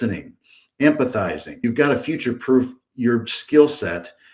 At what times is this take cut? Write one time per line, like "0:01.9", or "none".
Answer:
0:01.6